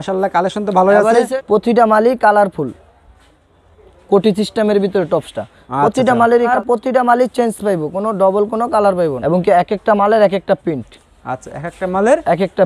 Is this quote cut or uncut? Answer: cut